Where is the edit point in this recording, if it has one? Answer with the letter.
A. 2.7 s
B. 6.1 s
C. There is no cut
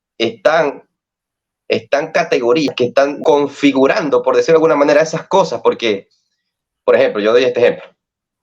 A